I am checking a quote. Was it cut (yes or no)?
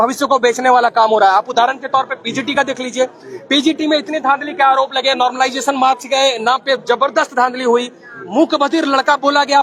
no